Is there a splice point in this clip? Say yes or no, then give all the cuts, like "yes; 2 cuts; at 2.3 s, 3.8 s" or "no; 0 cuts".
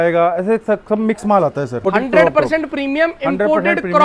yes; 1 cut; at 1.9 s